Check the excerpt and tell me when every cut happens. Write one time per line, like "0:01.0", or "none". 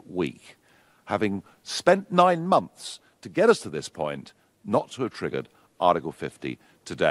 none